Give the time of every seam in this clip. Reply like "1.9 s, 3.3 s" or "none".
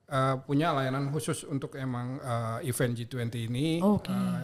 none